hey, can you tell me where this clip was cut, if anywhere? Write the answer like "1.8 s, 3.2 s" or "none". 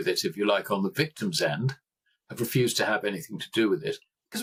none

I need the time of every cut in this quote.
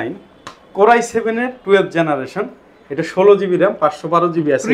none

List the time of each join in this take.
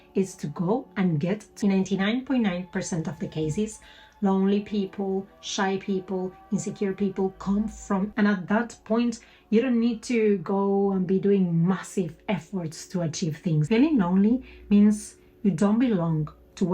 1.5 s, 8.1 s, 13.7 s

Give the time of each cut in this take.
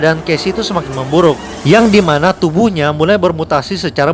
none

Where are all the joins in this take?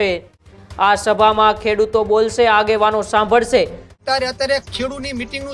3.9 s

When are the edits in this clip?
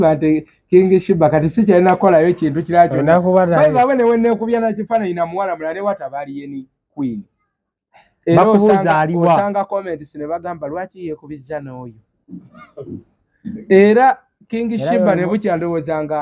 none

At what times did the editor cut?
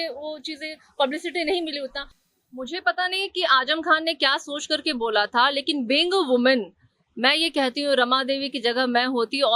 2.1 s

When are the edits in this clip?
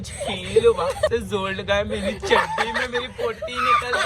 1.1 s

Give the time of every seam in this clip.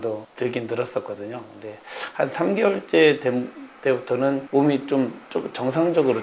none

